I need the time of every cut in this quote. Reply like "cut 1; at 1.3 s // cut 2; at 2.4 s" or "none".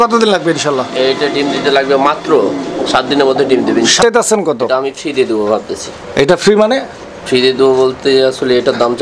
cut 1; at 4.0 s